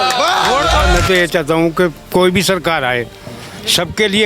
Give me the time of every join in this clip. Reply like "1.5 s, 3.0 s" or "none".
0.9 s